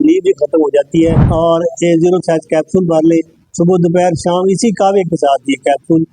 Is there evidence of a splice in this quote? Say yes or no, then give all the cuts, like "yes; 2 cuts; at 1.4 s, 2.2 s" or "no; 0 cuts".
yes; 1 cut; at 1.2 s